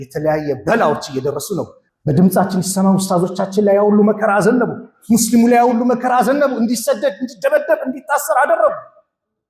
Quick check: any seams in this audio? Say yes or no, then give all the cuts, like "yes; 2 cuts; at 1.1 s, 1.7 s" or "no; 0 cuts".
yes; 1 cut; at 1.8 s